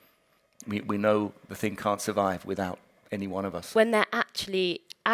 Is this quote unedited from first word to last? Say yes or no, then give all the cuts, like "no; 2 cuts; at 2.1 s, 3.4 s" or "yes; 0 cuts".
no; 2 cuts; at 1.4 s, 3.7 s